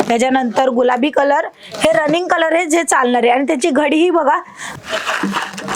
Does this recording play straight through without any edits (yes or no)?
no